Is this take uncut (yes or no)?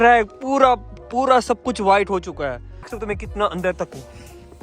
no